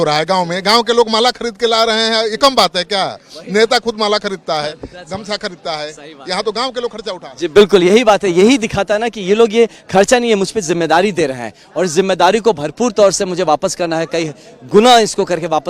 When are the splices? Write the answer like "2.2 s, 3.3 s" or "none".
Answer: none